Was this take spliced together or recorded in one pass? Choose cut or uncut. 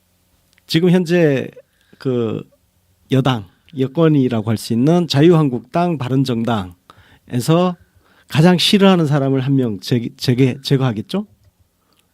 uncut